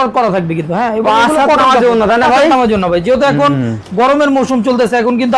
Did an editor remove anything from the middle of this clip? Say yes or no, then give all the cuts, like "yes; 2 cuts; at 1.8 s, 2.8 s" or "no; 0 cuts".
no; 0 cuts